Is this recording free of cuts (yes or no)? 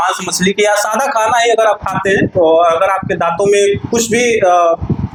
yes